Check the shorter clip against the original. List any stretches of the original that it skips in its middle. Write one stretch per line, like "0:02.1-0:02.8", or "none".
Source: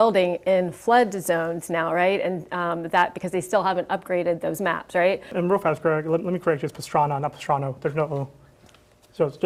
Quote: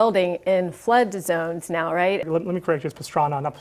0:02.2-0:06.0